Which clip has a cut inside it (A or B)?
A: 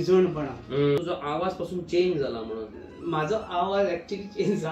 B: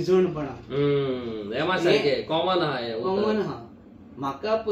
A